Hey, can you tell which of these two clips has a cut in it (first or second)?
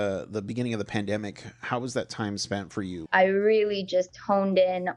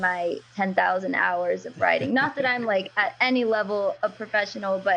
first